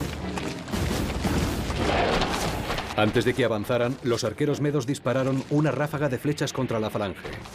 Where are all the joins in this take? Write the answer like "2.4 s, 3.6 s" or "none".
2.1 s